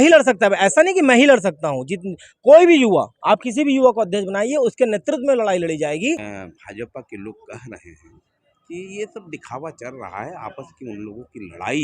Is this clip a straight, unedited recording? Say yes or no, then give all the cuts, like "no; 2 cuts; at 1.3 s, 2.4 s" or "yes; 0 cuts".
no; 1 cut; at 6.3 s